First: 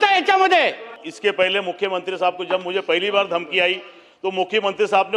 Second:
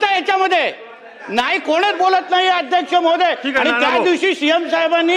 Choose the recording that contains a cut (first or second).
first